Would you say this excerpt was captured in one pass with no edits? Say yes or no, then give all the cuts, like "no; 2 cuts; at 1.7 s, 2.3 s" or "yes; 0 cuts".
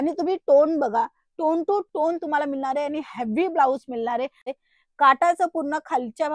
no; 1 cut; at 4.5 s